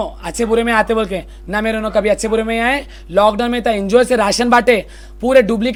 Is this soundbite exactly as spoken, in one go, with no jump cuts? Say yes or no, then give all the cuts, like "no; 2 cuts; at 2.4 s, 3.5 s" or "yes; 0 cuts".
yes; 0 cuts